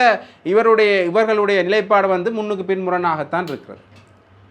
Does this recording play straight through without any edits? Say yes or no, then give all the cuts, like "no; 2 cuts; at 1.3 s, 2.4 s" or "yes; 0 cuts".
yes; 0 cuts